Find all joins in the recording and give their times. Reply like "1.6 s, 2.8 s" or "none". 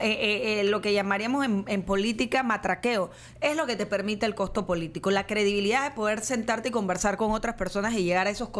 none